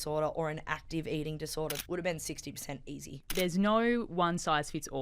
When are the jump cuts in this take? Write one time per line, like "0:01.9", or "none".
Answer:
0:01.8
0:03.3